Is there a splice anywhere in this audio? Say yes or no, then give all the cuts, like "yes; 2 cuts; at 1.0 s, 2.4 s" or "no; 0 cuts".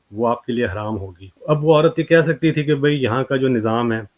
yes; 1 cut; at 1.3 s